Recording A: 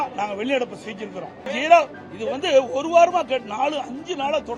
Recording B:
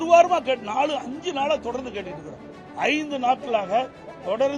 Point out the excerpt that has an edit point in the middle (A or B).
A